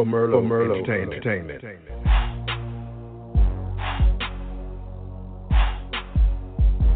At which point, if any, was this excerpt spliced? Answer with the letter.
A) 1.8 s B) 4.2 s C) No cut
A